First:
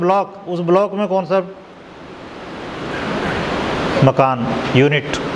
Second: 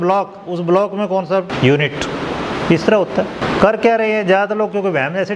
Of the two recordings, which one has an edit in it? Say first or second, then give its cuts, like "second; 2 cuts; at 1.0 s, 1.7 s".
second; 2 cuts; at 1.5 s, 3.4 s